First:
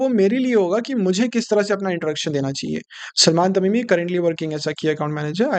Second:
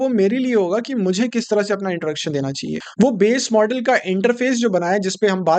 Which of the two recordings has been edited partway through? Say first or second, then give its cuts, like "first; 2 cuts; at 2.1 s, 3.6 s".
second; 1 cut; at 2.8 s